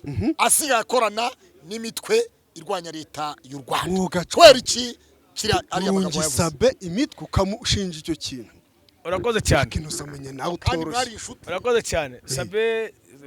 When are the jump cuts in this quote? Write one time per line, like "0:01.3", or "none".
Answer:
none